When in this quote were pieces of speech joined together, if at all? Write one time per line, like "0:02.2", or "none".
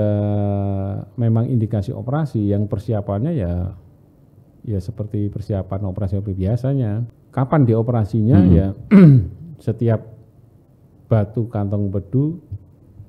0:07.2